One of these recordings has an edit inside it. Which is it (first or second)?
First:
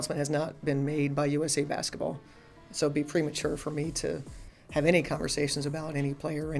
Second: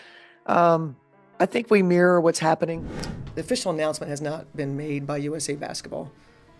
second